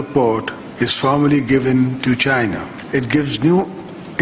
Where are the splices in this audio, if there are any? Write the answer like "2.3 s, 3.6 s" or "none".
2.7 s